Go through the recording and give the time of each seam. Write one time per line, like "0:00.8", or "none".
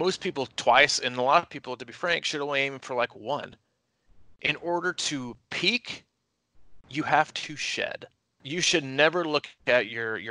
0:08.4